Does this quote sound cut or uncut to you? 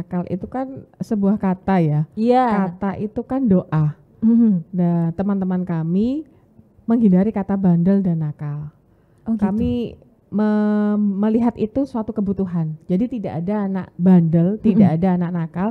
uncut